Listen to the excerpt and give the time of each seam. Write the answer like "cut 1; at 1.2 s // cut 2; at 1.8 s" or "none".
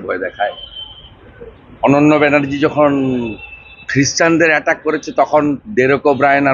none